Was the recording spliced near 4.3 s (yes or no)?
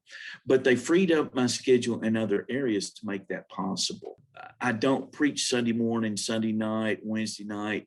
yes